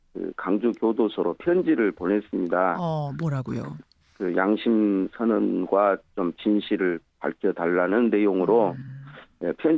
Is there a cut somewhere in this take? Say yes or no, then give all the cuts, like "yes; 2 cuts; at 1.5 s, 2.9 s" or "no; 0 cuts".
no; 0 cuts